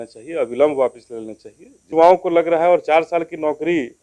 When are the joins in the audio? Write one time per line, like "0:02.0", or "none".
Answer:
0:01.9